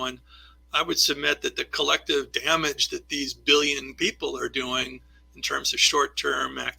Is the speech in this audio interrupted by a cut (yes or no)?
no